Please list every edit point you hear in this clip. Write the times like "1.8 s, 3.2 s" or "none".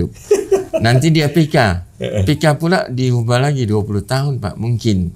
none